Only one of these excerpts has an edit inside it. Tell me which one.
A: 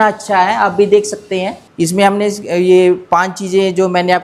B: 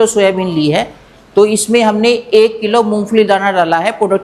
A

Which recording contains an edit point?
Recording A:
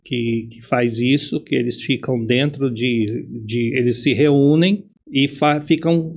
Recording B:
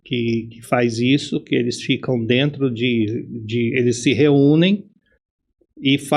A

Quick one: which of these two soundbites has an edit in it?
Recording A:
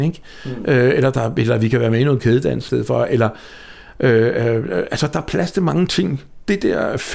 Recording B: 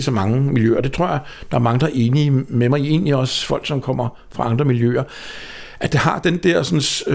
A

